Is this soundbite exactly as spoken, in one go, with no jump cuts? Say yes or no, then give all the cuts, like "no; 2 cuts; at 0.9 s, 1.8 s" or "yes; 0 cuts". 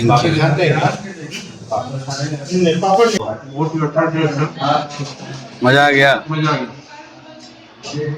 no; 1 cut; at 3.2 s